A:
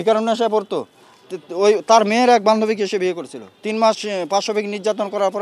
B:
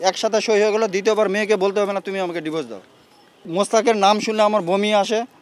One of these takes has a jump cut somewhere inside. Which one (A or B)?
B